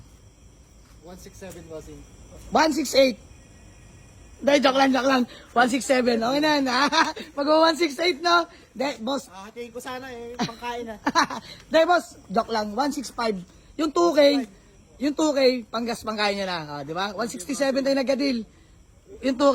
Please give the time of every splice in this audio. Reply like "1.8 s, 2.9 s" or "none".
none